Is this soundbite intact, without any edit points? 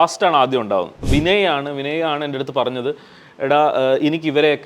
no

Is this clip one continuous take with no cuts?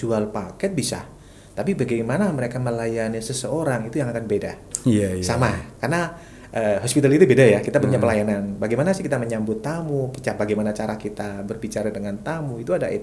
yes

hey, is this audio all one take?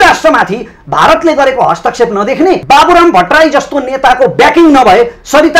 no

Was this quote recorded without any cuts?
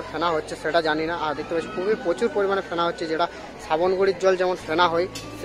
yes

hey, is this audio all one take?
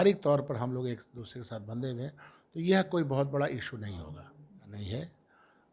no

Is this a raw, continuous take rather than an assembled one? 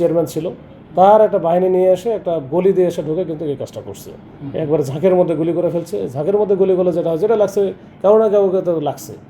yes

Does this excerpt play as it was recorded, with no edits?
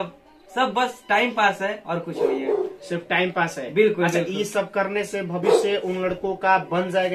yes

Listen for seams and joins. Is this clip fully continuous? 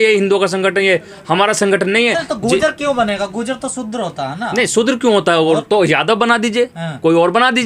yes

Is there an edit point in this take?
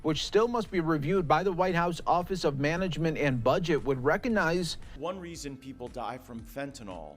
yes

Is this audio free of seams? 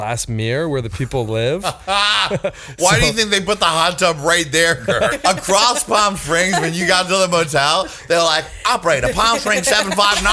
no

